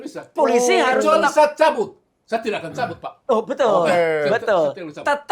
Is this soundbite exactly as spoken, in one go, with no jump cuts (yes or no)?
yes